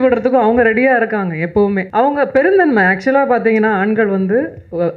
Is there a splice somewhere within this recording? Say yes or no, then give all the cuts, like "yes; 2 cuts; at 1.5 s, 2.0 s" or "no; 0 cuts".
yes; 1 cut; at 1.9 s